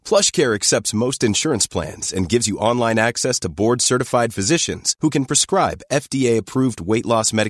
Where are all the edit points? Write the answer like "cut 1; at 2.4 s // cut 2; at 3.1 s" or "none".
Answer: none